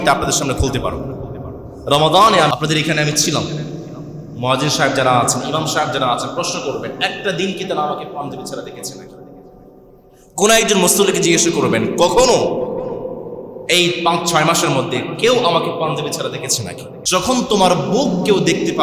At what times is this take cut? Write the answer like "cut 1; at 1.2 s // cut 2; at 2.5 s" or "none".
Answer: cut 1; at 2.5 s // cut 2; at 17.0 s